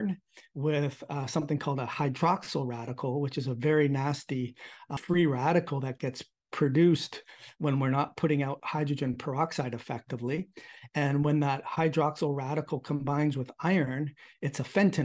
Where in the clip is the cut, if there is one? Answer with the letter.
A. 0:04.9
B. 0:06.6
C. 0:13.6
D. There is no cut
A